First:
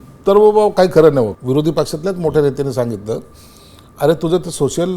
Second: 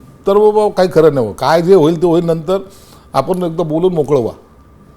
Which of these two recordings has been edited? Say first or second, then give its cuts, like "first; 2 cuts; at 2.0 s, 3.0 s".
first; 1 cut; at 1.3 s